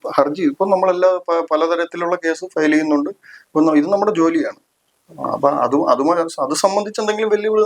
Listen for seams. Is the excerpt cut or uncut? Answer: uncut